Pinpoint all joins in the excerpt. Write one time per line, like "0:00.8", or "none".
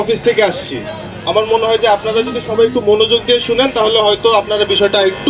none